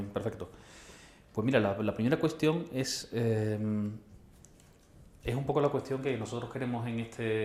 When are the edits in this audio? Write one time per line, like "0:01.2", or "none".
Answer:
0:05.6

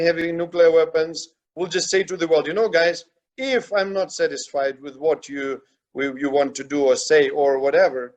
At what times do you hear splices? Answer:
none

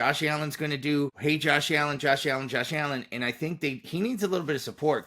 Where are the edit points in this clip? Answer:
0:01.2

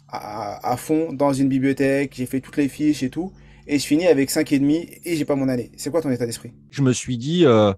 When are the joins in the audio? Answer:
0:06.8

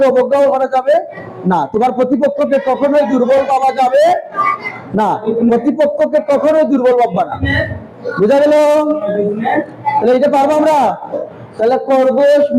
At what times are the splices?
0:11.1

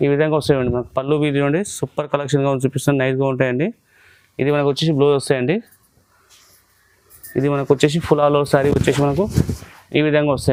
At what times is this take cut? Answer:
none

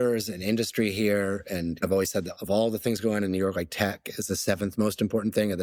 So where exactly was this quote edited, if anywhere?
none

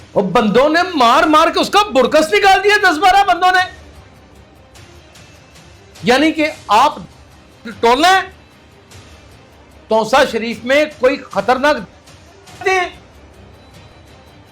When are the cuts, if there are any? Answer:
0:04.3
0:06.0

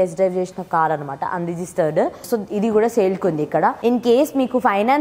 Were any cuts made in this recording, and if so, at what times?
0:02.2
0:03.8

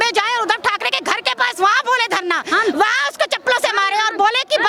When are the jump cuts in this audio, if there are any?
none

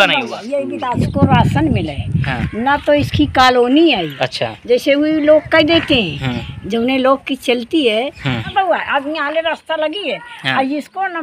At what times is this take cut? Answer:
0:01.0
0:08.5

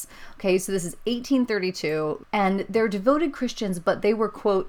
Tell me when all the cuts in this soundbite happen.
0:02.2

